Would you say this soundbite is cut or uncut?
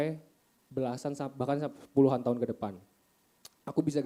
uncut